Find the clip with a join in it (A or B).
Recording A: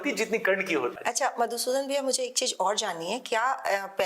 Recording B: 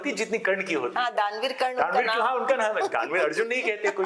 A